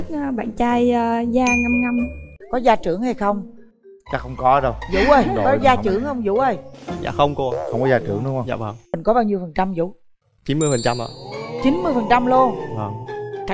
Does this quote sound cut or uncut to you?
cut